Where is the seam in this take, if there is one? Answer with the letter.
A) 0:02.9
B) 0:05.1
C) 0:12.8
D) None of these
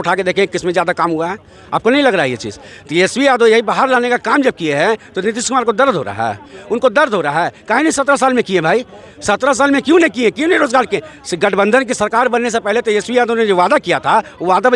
D